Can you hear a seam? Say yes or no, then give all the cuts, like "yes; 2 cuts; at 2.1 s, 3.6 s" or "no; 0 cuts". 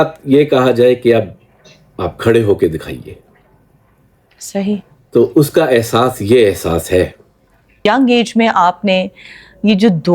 yes; 1 cut; at 7.8 s